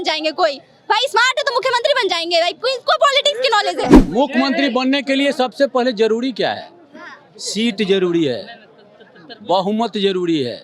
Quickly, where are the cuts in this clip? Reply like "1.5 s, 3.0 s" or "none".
4.0 s